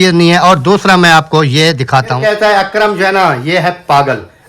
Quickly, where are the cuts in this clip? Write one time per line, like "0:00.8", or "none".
0:02.2